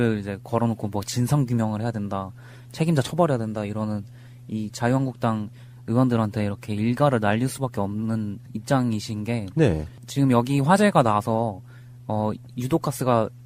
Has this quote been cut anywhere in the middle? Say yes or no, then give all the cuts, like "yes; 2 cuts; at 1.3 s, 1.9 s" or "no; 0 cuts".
no; 0 cuts